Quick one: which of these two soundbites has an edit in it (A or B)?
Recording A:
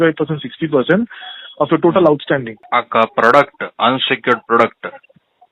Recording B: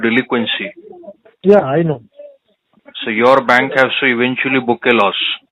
A